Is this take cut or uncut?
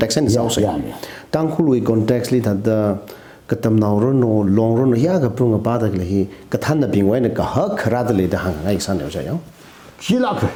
uncut